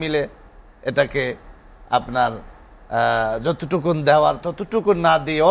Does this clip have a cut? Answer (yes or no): no